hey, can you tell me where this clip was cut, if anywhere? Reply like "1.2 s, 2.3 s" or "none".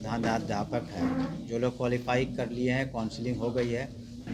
none